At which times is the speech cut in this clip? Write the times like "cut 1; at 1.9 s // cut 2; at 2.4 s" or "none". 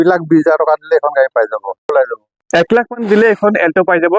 cut 1; at 1.9 s